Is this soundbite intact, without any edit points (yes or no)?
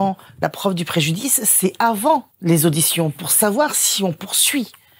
no